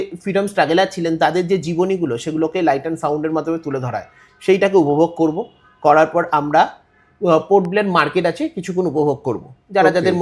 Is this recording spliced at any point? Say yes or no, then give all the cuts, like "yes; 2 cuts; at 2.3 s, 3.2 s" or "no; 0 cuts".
no; 0 cuts